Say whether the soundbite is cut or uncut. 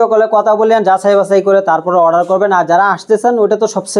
uncut